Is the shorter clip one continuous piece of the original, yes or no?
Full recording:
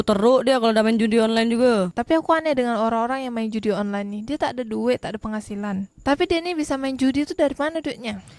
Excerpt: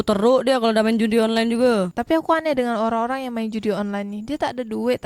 yes